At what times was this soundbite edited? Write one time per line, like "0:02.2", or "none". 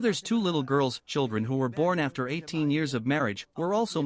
0:01.5